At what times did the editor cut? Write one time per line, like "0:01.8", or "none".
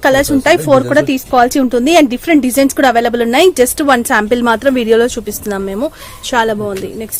none